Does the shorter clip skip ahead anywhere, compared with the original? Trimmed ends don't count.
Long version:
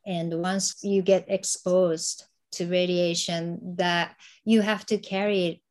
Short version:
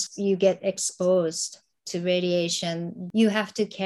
yes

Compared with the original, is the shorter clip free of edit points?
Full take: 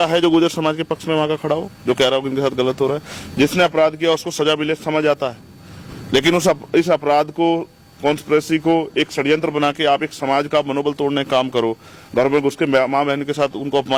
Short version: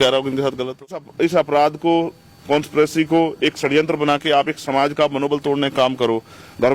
no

